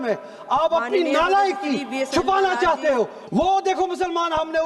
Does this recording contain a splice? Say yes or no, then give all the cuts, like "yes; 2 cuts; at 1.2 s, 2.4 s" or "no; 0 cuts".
yes; 1 cut; at 3.2 s